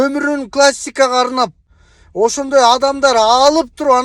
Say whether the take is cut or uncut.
cut